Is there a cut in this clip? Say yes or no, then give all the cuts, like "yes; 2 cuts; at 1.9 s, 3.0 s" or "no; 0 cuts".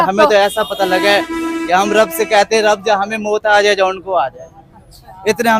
no; 0 cuts